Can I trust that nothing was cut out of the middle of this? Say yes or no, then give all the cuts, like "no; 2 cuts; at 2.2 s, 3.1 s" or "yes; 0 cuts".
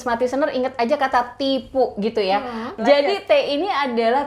no; 1 cut; at 2.7 s